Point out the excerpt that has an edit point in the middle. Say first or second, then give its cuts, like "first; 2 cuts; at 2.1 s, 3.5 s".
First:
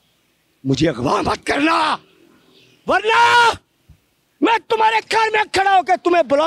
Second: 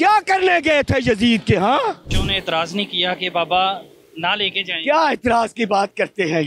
second; 1 cut; at 2.2 s